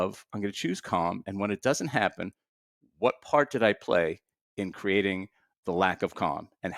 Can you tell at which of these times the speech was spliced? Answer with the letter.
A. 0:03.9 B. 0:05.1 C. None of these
C